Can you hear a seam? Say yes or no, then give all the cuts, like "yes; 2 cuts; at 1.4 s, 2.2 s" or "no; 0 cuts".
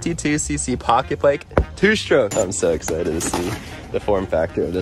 yes; 1 cut; at 2.3 s